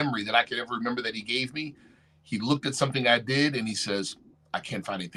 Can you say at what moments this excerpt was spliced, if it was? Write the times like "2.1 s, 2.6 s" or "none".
none